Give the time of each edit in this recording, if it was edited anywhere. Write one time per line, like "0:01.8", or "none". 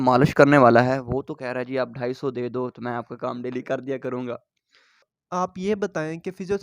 0:05.1